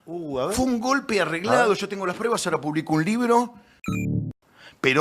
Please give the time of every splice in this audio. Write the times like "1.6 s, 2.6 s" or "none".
4.1 s